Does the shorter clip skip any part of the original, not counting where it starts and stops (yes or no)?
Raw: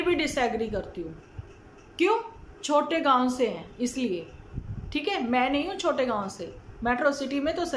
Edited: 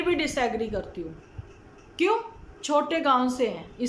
no